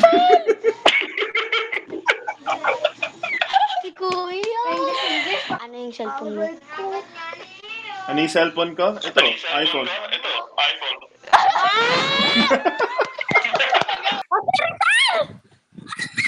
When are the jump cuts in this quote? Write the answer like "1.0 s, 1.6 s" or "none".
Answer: 5.6 s, 14.2 s